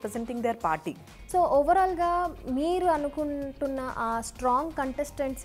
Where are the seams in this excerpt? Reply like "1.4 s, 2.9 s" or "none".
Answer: 1.1 s